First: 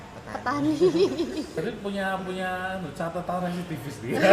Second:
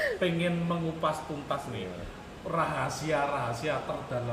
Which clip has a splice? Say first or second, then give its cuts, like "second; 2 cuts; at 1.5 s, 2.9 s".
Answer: first; 1 cut; at 1.6 s